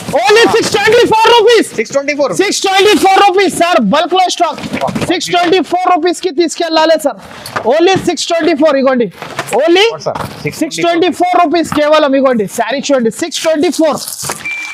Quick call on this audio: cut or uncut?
uncut